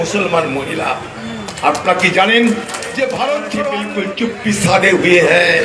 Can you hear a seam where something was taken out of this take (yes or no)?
yes